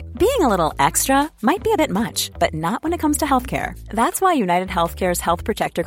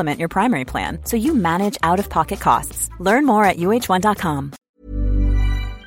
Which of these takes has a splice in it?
second; 1 cut; at 4.5 s

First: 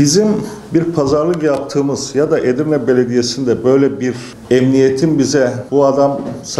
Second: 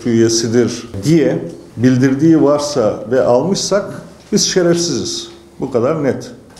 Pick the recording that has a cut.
first; 1 cut; at 5.6 s

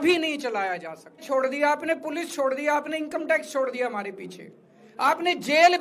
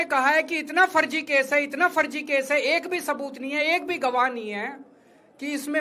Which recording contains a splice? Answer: first; 1 cut; at 1.3 s

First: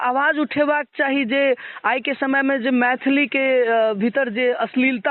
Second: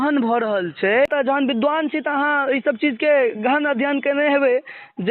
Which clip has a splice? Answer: second; 1 cut; at 1.1 s

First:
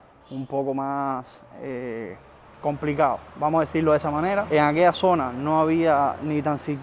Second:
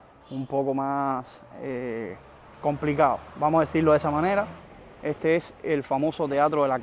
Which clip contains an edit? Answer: second; 1 cut; at 4.5 s

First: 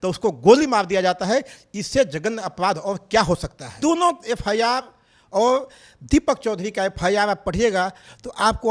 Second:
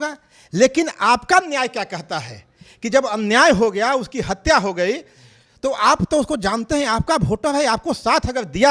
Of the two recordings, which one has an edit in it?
first; 1 cut; at 3.7 s

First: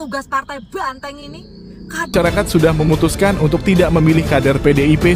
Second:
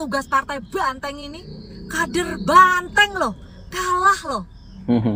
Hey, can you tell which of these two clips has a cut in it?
first; 1 cut; at 2.1 s

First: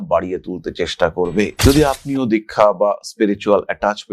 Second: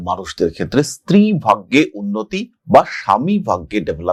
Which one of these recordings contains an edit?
first; 1 cut; at 1.5 s

